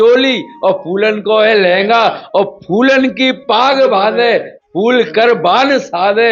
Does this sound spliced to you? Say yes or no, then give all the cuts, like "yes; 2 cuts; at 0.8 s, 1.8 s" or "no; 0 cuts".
no; 0 cuts